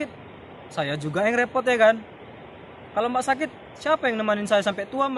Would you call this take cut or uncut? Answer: uncut